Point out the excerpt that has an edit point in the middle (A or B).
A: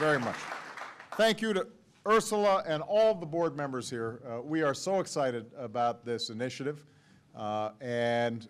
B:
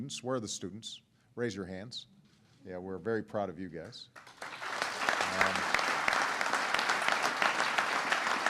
B